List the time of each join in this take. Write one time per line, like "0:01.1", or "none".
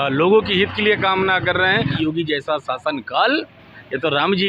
0:02.0